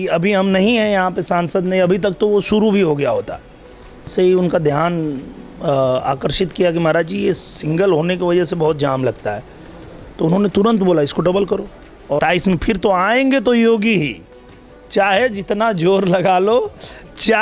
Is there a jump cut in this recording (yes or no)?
yes